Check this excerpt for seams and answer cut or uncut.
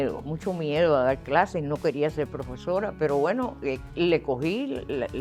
uncut